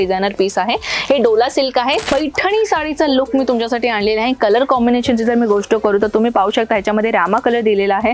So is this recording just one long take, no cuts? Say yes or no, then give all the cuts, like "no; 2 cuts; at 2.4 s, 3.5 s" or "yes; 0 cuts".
no; 1 cut; at 2.0 s